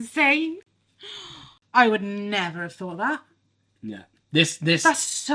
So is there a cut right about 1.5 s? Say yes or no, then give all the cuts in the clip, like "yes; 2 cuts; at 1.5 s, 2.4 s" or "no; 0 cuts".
yes; 1 cut; at 1.5 s